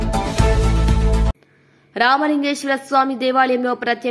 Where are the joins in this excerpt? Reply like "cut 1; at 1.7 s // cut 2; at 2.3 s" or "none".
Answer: none

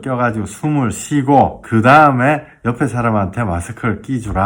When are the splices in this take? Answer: cut 1; at 1.6 s

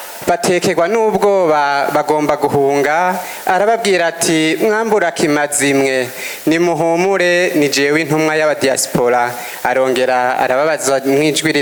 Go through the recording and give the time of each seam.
none

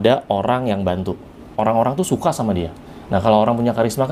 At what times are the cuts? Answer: cut 1; at 1.4 s

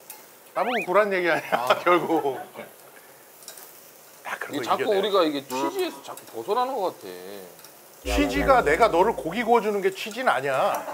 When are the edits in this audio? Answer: none

